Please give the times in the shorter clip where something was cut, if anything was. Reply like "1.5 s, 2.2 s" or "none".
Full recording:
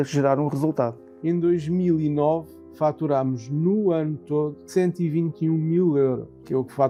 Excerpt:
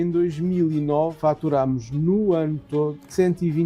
1.1 s